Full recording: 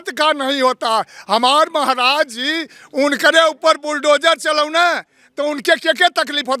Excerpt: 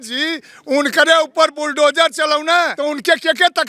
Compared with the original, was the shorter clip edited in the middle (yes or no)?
yes